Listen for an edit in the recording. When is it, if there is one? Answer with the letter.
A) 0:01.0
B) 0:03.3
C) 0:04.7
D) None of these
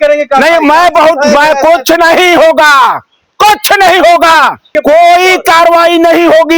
C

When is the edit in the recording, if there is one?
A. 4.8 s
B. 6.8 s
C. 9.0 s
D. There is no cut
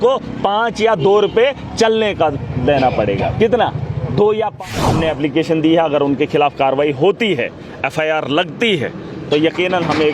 A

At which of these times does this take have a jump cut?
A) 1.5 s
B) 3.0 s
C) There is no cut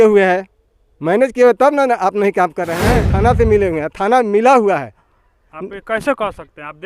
B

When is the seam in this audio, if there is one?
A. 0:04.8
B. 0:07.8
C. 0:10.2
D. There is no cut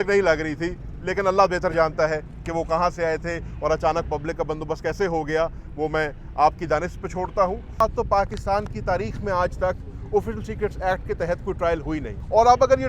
B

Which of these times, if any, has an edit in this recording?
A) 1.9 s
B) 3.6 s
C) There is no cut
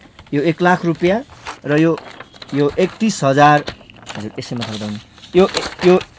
C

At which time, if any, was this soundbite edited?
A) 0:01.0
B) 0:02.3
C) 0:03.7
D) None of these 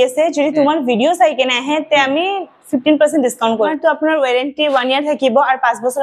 C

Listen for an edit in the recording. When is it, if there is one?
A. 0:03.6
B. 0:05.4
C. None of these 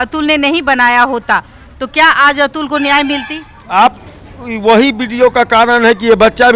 C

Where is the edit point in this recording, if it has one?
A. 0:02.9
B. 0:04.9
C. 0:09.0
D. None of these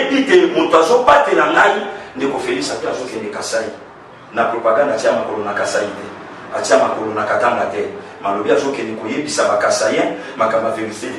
A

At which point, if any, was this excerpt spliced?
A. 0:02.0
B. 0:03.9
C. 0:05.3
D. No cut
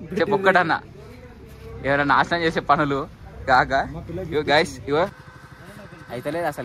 C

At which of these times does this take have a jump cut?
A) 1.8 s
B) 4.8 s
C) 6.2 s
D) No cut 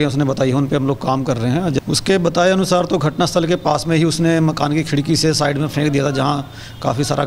A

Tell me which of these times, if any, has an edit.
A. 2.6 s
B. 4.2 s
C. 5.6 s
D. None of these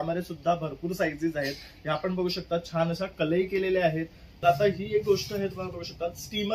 B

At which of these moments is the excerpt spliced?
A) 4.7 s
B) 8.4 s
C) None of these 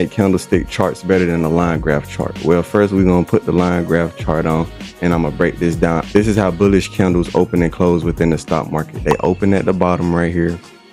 C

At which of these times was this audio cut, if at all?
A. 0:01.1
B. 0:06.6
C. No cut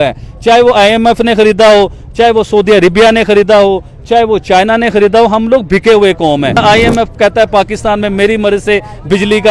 B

